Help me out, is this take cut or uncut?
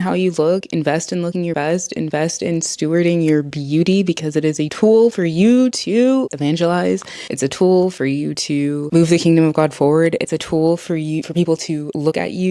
uncut